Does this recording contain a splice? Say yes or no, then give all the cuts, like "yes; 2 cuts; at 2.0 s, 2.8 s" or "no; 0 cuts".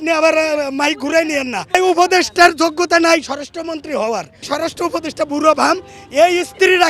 yes; 2 cuts; at 1.8 s, 4.5 s